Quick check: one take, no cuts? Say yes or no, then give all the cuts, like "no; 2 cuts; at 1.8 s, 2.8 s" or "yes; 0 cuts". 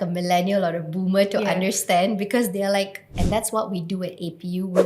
no; 1 cut; at 3.1 s